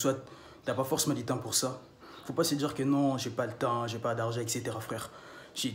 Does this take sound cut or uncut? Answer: uncut